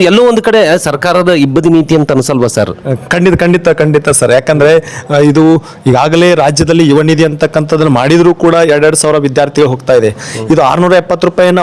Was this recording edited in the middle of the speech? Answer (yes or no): no